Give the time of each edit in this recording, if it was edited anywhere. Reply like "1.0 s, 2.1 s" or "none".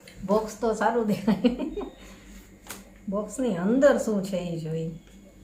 none